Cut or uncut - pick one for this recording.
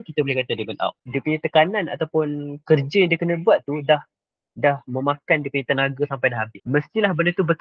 cut